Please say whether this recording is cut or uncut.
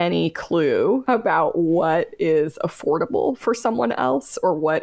cut